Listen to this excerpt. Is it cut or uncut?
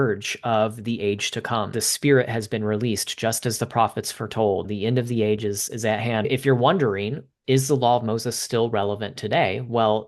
cut